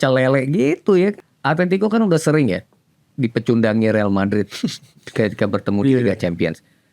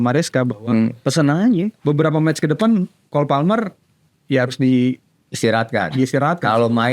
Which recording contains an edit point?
first; 1 cut; at 1.2 s

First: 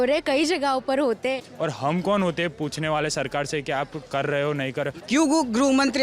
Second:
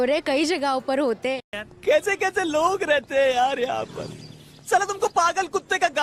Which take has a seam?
first; 2 cuts; at 1.5 s, 4.9 s

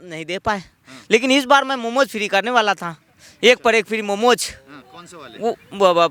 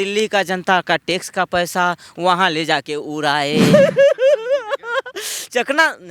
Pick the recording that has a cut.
second; 1 cut; at 3.7 s

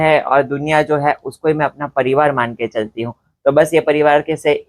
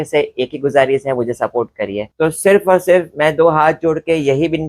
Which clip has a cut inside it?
second; 1 cut; at 2.0 s

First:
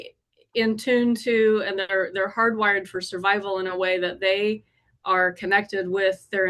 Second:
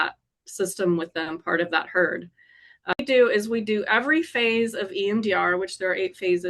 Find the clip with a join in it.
second; 1 cut; at 3.0 s

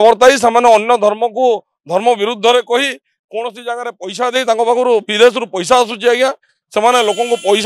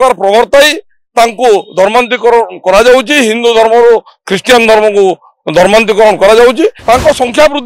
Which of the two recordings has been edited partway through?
second; 1 cut; at 6.8 s

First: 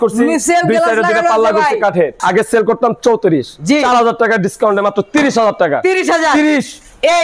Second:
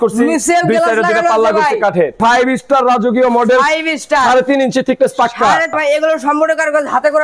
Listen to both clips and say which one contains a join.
second; 2 cuts; at 2.2 s, 5.7 s

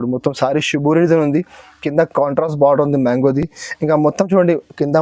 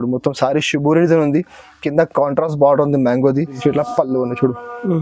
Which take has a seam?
second; 1 cut; at 3.5 s

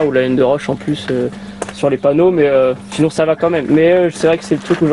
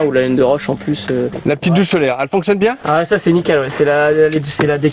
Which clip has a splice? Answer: second; 1 cut; at 1.4 s

